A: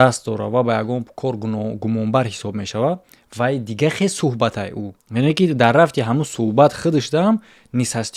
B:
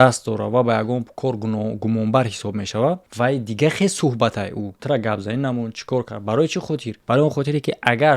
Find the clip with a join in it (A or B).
B